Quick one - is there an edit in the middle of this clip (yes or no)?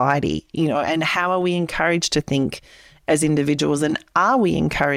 no